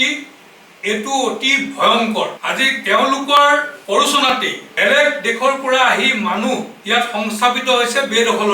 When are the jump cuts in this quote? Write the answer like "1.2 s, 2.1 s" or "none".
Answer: 2.4 s, 3.7 s, 4.6 s, 6.7 s